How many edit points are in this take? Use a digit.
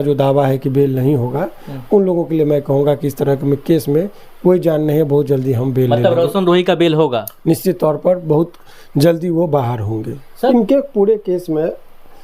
1